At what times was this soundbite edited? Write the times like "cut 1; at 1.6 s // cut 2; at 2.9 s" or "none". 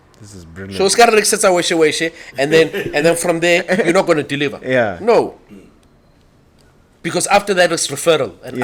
none

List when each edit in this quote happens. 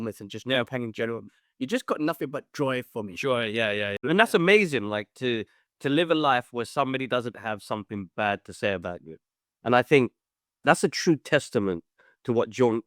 cut 1; at 4.0 s

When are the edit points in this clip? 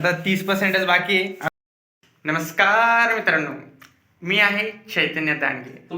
cut 1; at 1.5 s

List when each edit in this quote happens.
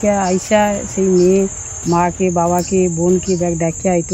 none

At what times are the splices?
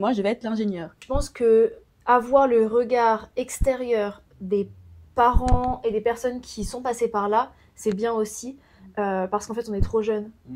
cut 1; at 1.0 s

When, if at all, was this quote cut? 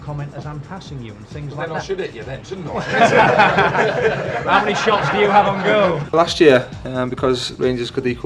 cut 1; at 6.1 s

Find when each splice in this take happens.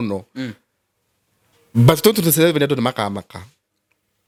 none

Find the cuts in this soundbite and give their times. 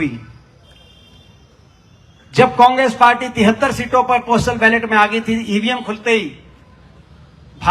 none

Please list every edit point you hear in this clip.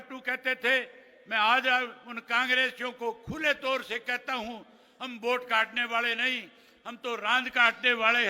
none

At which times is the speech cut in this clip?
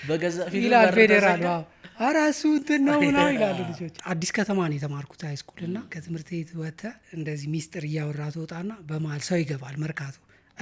cut 1; at 4.0 s // cut 2; at 5.9 s // cut 3; at 7.0 s

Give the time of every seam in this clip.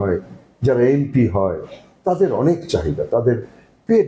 none

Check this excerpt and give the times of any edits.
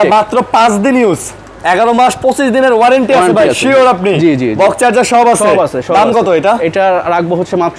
none

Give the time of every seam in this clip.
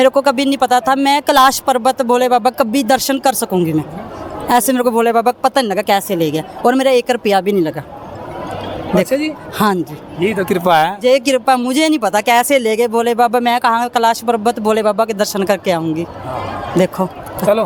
none

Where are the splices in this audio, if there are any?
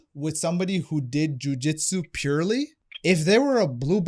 cut 1; at 2.8 s

